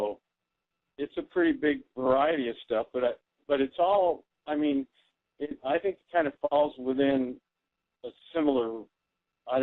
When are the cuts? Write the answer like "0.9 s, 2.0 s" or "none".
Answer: 3.7 s